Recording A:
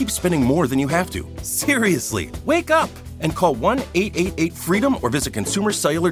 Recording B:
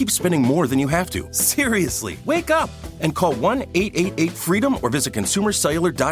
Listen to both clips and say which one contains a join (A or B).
B